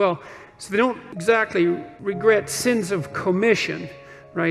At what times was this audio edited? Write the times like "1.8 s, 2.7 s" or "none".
1.1 s, 1.9 s